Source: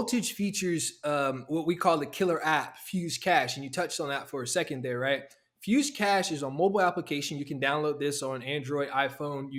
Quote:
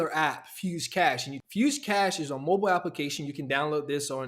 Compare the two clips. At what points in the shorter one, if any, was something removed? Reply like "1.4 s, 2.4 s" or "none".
1.3 s